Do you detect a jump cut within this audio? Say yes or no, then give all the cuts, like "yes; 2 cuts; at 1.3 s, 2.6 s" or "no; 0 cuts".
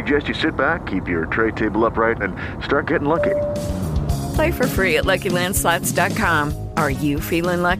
no; 0 cuts